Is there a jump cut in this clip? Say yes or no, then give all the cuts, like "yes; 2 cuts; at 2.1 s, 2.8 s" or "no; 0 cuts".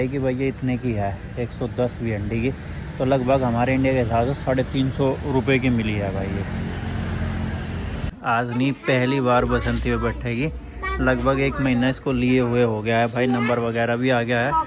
yes; 1 cut; at 8.0 s